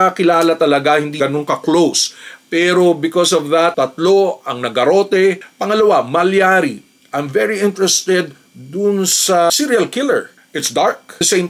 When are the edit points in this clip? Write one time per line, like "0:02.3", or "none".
0:01.2
0:05.4
0:10.4